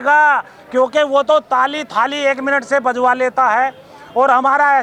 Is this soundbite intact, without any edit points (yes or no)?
yes